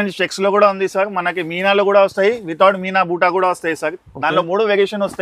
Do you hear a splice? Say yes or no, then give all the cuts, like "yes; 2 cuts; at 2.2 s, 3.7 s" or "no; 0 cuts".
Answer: no; 0 cuts